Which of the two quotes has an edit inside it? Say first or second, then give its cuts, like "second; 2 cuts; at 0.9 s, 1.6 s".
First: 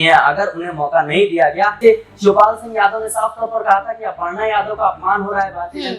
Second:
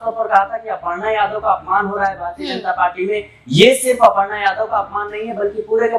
first; 1 cut; at 1.8 s